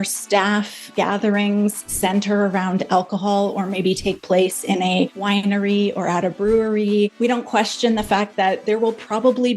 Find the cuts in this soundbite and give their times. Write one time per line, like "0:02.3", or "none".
0:00.9
0:05.2
0:07.1